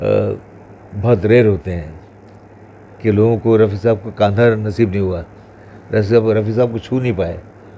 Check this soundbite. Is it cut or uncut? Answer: uncut